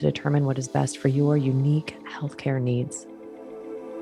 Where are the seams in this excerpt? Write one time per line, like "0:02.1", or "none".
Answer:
0:03.0